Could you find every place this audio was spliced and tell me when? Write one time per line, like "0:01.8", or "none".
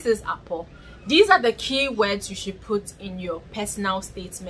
none